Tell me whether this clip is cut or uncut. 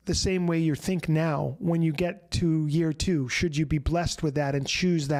uncut